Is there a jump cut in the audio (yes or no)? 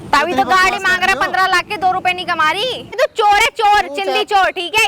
yes